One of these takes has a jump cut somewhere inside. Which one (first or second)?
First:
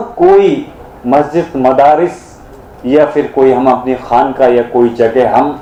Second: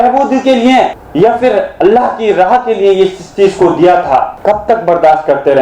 second